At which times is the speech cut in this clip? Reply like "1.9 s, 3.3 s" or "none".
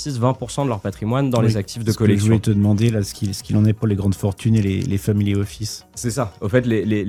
none